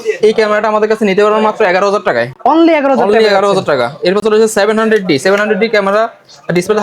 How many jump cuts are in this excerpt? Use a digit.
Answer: 0